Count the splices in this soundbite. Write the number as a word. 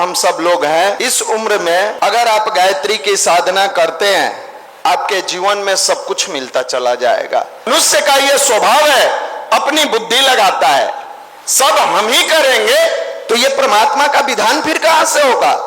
three